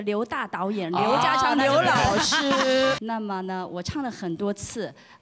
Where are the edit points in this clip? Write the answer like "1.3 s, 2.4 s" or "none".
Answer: 3.0 s